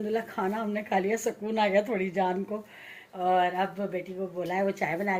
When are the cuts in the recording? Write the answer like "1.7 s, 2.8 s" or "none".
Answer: none